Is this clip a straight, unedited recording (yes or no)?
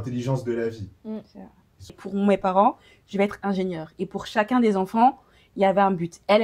no